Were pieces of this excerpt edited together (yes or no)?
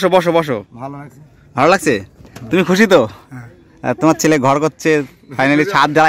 no